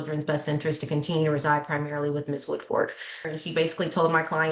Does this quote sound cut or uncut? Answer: cut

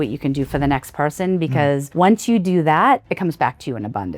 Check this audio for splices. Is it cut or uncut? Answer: cut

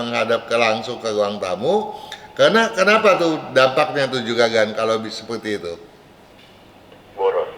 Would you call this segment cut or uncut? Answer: uncut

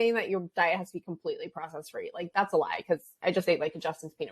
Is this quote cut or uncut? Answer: cut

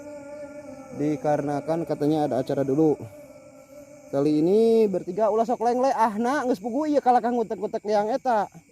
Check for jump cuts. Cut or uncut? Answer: uncut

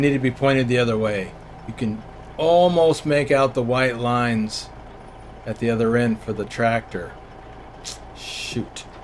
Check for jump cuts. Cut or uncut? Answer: uncut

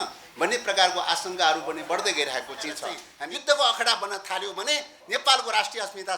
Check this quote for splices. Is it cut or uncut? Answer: cut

